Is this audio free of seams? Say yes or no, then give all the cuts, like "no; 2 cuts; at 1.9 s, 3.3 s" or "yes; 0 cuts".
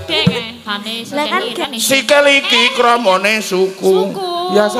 no; 1 cut; at 1.6 s